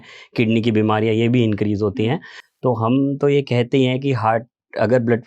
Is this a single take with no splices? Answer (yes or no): yes